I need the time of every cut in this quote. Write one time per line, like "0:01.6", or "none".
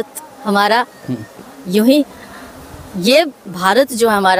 none